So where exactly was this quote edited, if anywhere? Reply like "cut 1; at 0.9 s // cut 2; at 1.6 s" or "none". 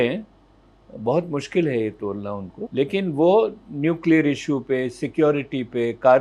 cut 1; at 2.5 s